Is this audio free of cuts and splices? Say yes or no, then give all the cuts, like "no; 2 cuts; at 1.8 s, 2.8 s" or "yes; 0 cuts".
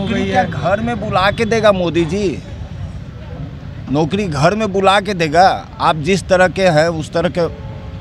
yes; 0 cuts